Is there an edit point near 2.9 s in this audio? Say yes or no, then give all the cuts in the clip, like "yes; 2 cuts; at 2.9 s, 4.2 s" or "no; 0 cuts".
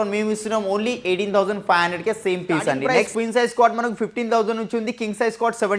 yes; 1 cut; at 2.9 s